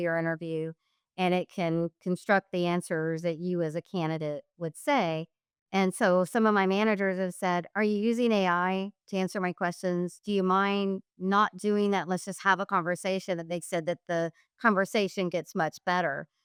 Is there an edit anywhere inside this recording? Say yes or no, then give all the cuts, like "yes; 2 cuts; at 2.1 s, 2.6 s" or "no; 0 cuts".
no; 0 cuts